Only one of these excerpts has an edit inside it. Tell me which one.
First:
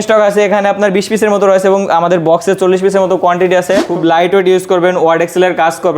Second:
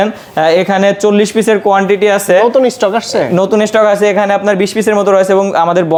first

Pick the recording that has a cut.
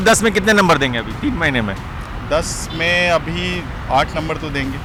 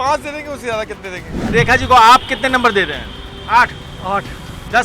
second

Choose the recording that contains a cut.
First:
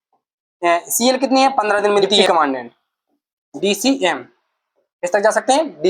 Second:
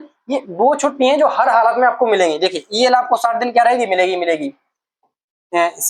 first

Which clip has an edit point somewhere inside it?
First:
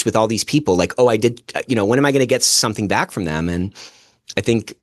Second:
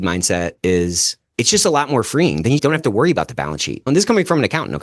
second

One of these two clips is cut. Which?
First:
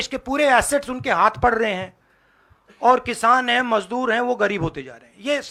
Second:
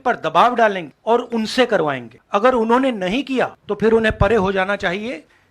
second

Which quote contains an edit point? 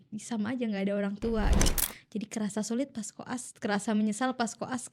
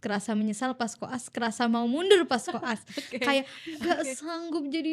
first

